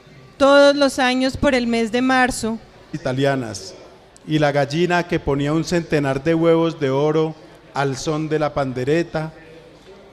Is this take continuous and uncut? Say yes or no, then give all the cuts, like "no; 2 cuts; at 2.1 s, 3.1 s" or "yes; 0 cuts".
yes; 0 cuts